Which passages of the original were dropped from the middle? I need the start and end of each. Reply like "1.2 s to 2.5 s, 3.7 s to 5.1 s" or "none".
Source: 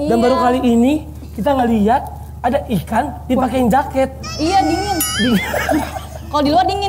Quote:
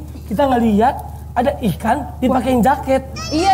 none